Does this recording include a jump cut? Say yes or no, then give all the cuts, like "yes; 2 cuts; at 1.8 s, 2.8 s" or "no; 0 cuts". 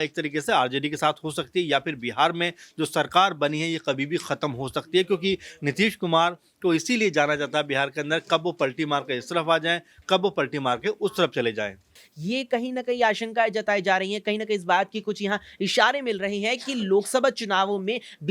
yes; 1 cut; at 12.0 s